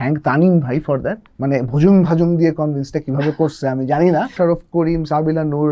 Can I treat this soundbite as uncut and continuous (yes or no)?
no